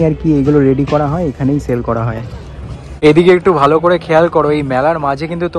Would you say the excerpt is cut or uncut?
cut